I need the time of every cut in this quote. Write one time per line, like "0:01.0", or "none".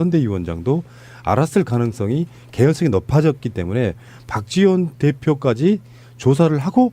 0:03.2